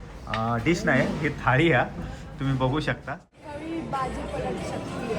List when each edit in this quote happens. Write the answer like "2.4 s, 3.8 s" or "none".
3.3 s